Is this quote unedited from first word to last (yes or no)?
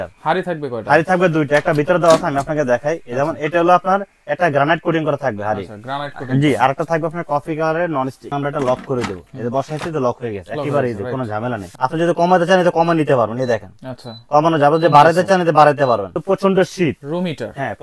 no